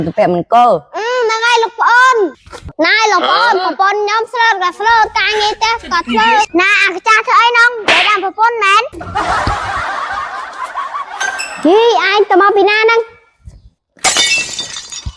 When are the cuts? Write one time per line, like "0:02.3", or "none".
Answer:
0:02.7
0:06.5

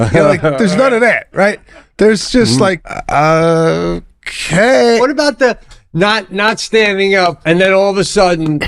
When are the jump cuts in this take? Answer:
0:02.9
0:05.0
0:07.4

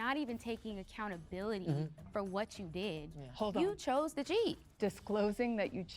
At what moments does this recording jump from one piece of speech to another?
0:03.2
0:04.7

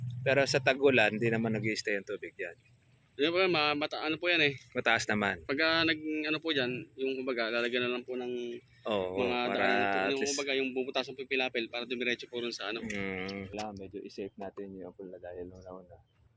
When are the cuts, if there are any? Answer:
0:13.5

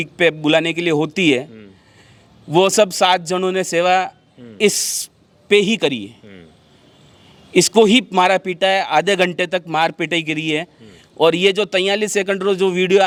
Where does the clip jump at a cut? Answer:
none

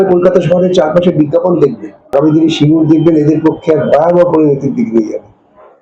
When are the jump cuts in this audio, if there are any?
0:02.1

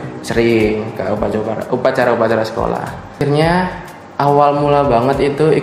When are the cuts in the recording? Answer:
0:03.2

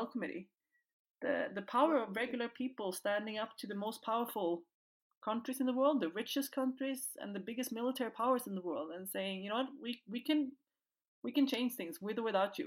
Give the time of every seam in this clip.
none

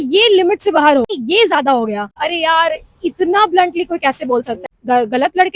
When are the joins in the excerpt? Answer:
0:01.1
0:02.2
0:04.6

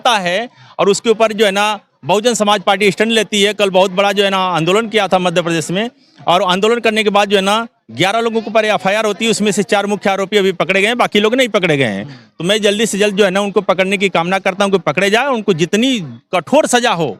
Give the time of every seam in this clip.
none

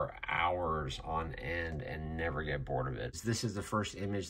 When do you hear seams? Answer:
0:03.2

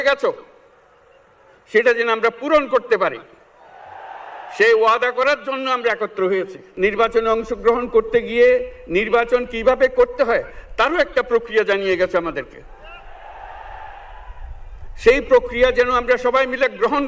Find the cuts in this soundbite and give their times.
0:06.7

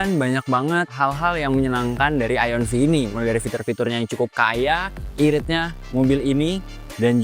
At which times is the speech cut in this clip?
0:00.9
0:05.0

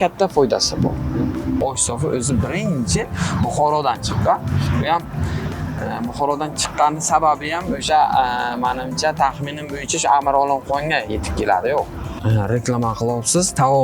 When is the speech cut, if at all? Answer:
0:01.6
0:12.1

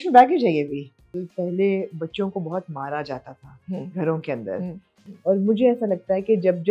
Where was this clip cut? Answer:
0:01.3
0:04.9

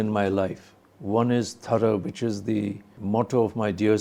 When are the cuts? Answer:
0:02.9

